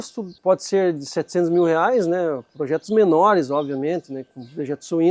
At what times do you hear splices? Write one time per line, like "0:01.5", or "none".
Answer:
none